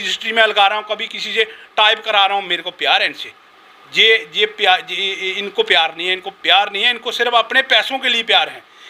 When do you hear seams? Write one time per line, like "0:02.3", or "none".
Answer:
none